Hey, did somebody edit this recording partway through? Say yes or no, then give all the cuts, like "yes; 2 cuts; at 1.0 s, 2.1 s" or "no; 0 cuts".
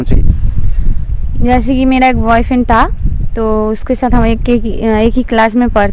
no; 0 cuts